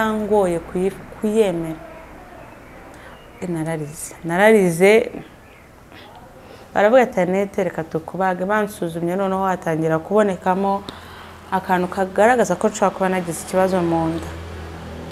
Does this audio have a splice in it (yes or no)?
no